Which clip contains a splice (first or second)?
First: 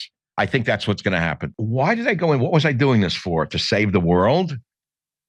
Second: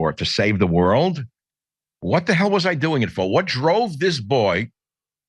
first